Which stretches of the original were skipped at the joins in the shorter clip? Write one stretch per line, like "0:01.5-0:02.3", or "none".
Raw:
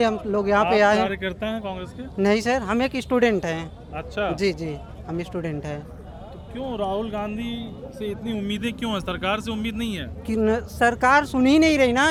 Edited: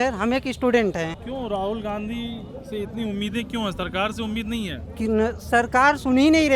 0:03.7-0:06.5